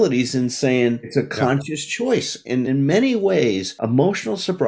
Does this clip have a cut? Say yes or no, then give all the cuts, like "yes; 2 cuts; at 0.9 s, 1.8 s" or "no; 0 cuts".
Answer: yes; 3 cuts; at 1.1 s, 2.7 s, 3.7 s